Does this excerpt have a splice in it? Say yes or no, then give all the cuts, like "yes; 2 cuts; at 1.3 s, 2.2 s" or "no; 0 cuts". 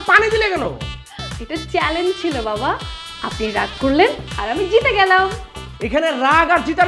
no; 0 cuts